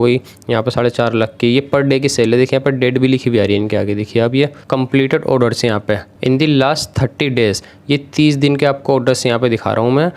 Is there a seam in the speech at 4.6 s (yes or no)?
yes